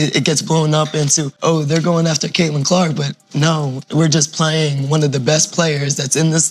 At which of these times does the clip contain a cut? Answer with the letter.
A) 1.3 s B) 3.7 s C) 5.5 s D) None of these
A